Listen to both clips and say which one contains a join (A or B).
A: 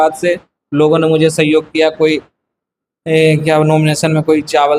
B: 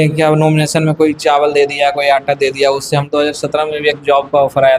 B